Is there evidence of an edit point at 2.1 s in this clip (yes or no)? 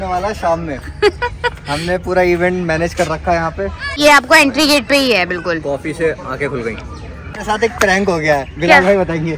no